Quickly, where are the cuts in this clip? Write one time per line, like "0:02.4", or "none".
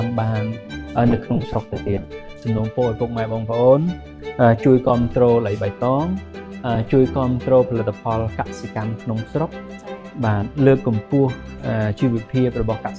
0:02.3

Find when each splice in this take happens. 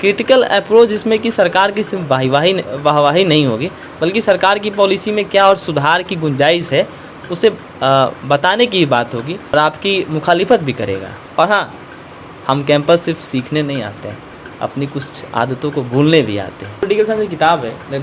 0:09.5
0:11.2
0:16.9

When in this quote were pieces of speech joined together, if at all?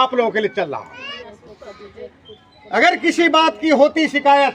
0:01.2

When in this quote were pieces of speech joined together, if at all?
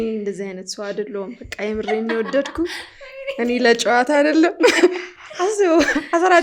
none

